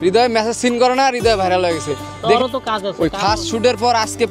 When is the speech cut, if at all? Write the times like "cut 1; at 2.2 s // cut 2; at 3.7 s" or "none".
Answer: cut 1; at 2.4 s